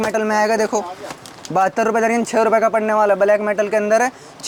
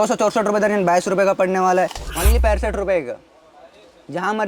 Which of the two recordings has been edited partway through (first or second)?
second